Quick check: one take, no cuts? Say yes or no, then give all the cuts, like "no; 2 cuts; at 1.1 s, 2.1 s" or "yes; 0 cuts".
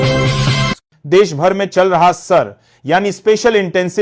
no; 1 cut; at 0.9 s